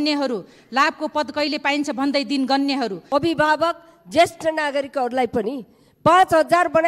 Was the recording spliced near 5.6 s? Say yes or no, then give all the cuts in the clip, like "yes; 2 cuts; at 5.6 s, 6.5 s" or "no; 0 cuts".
no; 1 cut; at 3.0 s